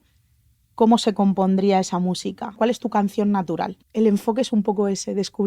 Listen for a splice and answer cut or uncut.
cut